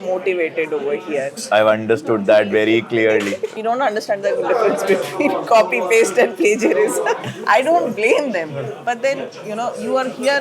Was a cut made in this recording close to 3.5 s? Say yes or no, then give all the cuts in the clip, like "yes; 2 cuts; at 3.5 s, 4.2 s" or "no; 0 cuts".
yes; 3 cuts; at 1.4 s, 3.5 s, 7.3 s